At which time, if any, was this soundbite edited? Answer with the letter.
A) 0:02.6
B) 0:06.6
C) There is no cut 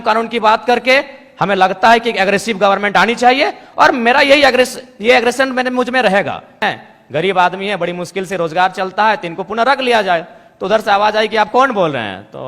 B